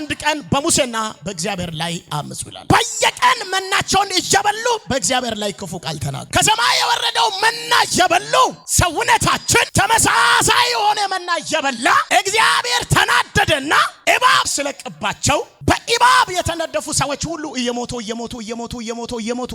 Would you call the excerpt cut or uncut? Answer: cut